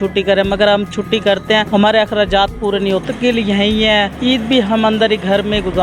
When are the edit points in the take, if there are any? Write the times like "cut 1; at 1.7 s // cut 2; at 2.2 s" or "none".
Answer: cut 1; at 1.7 s // cut 2; at 3.0 s // cut 3; at 4.1 s